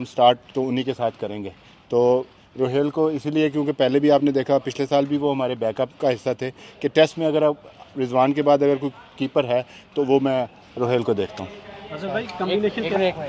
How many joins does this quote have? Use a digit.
0